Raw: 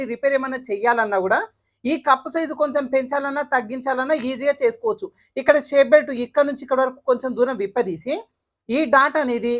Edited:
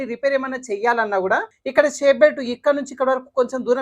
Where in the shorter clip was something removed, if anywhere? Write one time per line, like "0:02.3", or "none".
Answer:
0:01.6